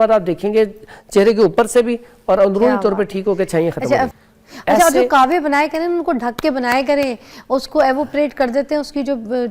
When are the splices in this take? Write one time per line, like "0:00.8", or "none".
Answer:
0:04.1

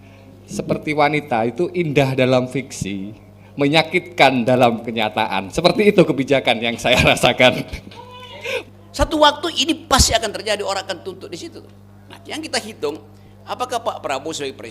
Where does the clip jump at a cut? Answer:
0:08.5

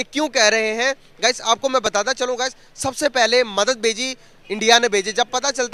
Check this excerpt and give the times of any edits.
none

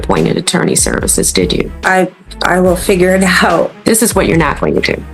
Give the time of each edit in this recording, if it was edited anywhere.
0:01.8
0:03.8

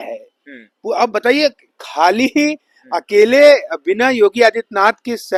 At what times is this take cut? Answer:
none

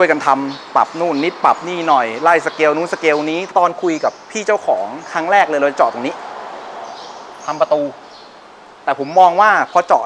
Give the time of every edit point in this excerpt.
0:03.5

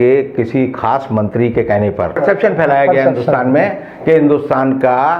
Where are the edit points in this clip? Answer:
0:02.2

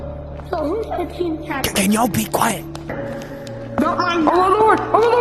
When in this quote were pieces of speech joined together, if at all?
0:02.9

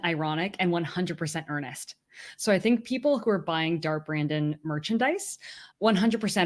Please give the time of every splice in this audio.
none

